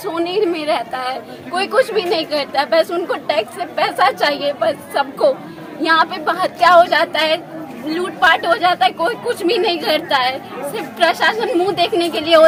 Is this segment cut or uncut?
uncut